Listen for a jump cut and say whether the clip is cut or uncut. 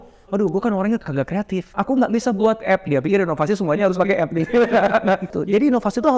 cut